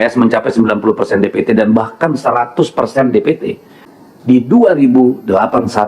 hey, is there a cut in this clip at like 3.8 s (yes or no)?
yes